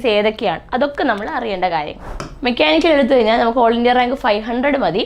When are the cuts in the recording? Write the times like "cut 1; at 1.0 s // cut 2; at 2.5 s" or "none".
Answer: cut 1; at 2.0 s